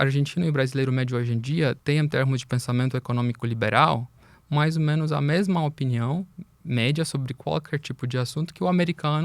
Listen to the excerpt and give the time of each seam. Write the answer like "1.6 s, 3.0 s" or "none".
1.8 s